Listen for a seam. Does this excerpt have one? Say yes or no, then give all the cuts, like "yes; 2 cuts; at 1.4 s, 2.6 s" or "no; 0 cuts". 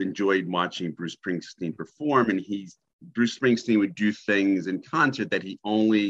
no; 0 cuts